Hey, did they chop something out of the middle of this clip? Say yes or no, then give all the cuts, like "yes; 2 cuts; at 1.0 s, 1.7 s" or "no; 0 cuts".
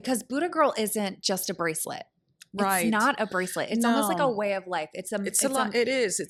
no; 0 cuts